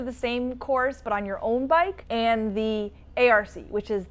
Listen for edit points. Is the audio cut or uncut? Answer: cut